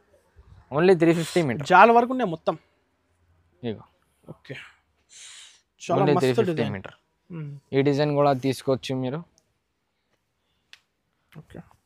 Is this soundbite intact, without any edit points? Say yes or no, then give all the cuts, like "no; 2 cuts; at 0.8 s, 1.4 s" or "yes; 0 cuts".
yes; 0 cuts